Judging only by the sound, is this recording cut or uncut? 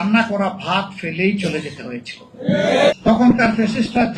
cut